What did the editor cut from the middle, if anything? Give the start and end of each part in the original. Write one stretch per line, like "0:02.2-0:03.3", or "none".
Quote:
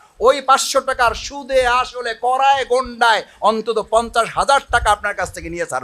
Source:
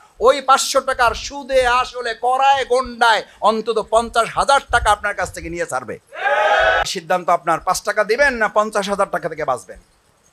none